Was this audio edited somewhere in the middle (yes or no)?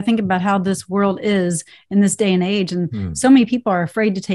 no